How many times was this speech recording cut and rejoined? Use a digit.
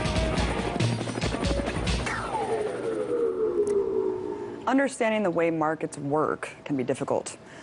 0